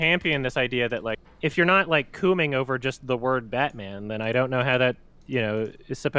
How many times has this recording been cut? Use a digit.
1